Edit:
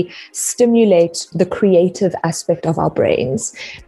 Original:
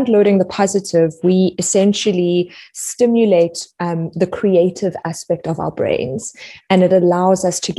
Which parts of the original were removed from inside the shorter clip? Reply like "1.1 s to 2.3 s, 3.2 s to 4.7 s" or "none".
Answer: 3.6 s to 4.1 s